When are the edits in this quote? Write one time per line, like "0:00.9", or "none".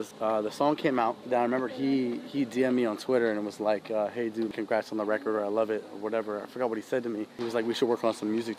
0:01.2
0:04.5
0:07.3